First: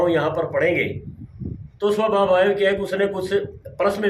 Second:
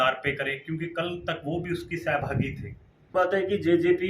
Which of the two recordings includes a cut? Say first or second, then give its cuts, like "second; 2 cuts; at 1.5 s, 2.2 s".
second; 1 cut; at 3.1 s